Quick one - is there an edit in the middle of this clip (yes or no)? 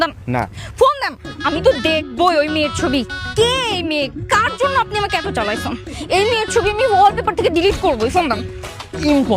yes